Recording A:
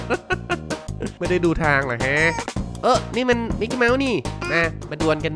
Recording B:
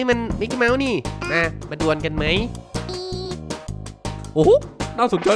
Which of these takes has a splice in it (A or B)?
B